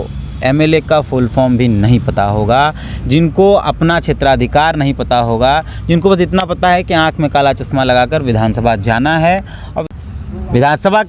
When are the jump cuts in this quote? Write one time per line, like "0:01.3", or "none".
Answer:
0:09.7